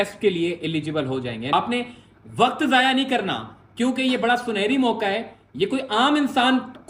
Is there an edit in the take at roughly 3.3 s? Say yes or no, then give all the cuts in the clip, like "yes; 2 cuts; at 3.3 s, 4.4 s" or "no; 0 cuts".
no; 1 cut; at 1.5 s